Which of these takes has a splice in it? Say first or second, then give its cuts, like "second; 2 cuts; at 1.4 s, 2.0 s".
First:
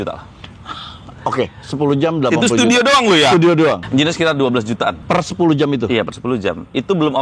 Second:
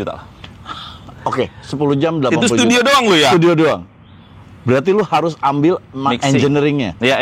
first; 2 cuts; at 3.8 s, 5.0 s